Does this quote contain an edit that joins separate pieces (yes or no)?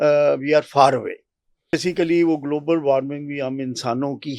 yes